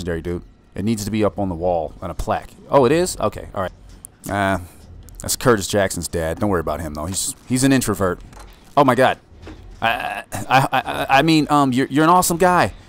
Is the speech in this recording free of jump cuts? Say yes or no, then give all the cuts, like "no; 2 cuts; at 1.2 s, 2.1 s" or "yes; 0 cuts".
no; 1 cut; at 3.8 s